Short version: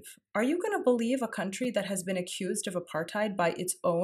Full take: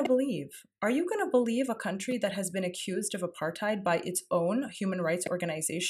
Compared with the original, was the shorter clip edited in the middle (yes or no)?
no